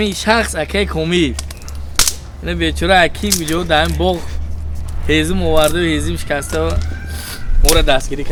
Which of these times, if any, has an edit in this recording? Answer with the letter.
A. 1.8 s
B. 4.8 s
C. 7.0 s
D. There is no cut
D